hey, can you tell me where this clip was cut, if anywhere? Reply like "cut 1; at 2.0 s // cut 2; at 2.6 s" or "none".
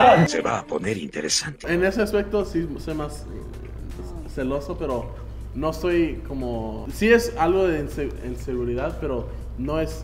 cut 1; at 1.5 s